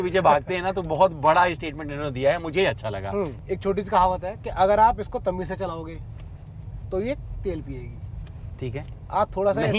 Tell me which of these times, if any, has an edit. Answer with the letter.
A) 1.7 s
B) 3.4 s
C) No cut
B